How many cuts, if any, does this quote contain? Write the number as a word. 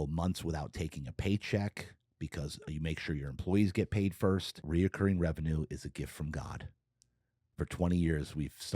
one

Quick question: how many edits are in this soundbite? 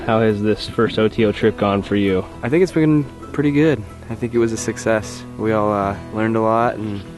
zero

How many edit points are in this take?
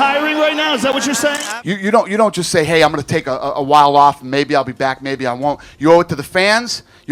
one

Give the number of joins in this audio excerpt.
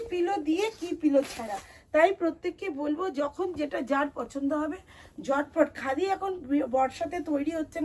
zero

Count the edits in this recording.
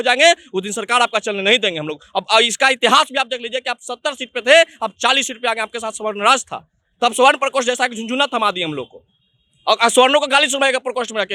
zero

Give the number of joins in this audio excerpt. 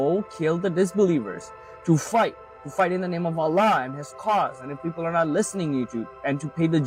zero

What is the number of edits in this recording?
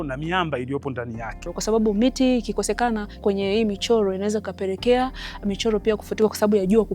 two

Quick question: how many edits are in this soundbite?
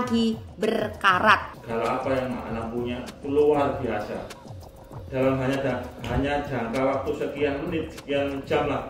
one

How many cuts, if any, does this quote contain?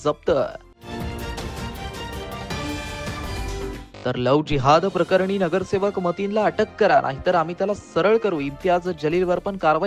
zero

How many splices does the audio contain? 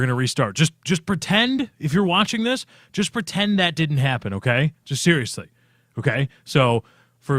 zero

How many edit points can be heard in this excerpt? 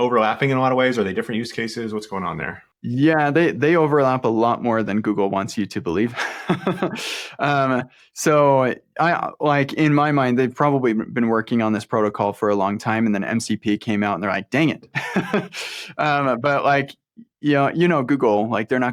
zero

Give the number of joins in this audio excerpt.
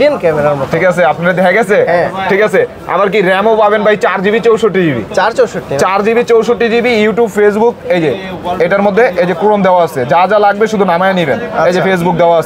zero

